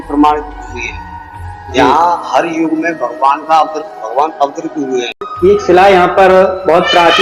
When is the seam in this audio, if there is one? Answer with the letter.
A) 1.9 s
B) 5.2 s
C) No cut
B